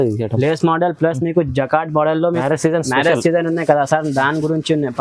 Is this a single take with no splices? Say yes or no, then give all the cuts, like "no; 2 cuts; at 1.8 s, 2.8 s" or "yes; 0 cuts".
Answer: no; 1 cut; at 2.4 s